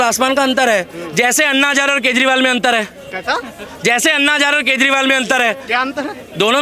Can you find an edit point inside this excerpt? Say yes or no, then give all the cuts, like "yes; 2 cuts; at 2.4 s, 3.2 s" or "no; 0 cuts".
no; 0 cuts